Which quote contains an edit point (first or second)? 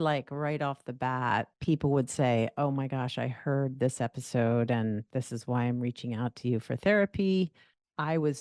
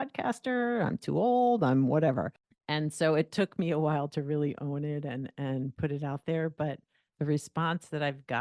first